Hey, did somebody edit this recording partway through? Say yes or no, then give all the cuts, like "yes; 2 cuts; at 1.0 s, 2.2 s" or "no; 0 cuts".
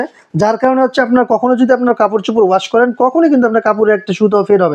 no; 0 cuts